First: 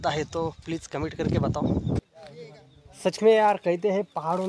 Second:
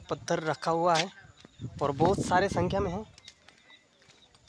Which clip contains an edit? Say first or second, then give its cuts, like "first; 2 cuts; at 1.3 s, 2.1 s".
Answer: first; 1 cut; at 2.0 s